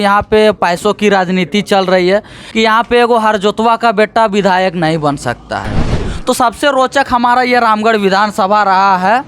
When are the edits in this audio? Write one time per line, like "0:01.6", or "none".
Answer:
0:02.4
0:06.1

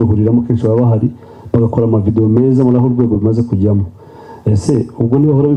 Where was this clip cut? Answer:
none

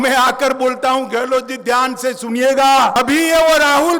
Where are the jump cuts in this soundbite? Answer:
0:03.0

